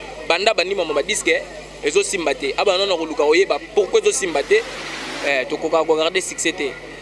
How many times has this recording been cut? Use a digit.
1